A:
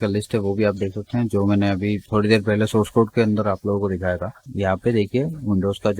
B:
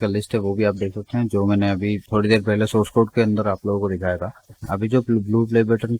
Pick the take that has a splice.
A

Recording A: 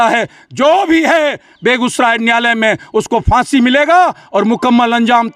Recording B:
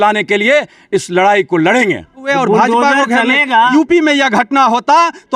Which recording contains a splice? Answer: B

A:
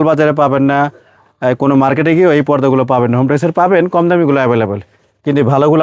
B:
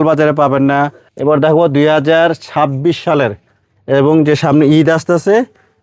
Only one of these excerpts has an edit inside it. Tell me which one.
B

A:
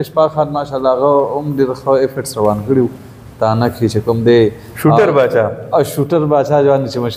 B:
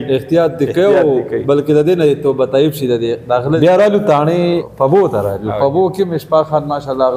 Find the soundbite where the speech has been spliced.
B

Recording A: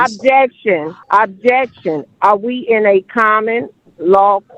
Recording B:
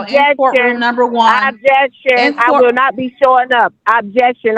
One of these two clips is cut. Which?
A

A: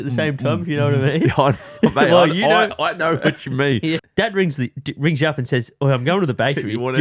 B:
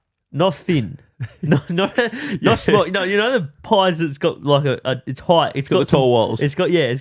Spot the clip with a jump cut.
A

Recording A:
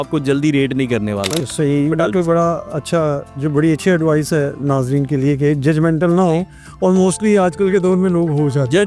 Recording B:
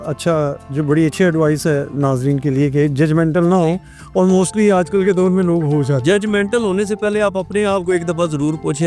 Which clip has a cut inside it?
A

